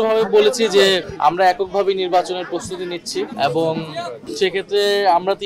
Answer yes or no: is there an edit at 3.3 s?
no